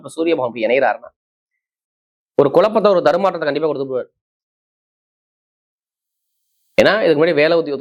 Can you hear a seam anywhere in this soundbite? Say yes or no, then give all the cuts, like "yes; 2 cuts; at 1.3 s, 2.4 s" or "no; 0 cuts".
no; 0 cuts